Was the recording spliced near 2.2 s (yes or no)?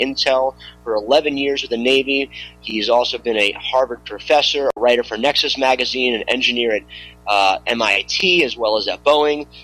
no